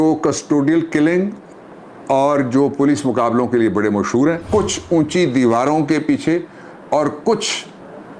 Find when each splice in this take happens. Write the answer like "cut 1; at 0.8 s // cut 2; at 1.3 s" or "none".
cut 1; at 4.4 s